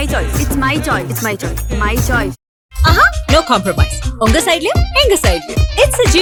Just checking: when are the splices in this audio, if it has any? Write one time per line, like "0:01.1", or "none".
none